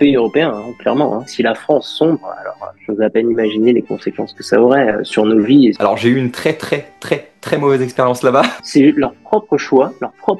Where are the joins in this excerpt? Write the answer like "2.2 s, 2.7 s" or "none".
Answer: 1.3 s, 5.8 s, 8.6 s